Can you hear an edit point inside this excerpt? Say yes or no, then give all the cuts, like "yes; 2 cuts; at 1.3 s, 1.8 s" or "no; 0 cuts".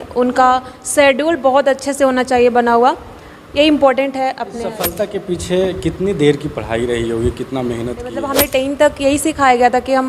yes; 2 cuts; at 4.8 s, 8.2 s